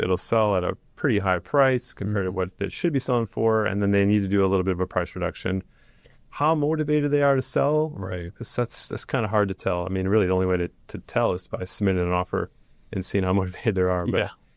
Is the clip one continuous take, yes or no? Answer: yes